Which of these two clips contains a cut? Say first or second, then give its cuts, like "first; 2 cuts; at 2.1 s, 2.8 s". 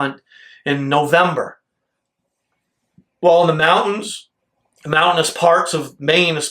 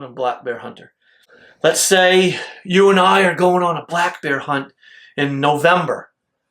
second; 1 cut; at 1.3 s